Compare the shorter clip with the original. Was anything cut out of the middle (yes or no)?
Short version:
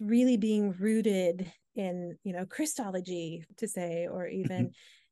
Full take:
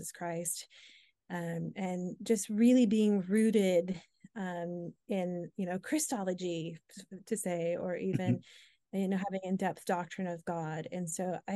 yes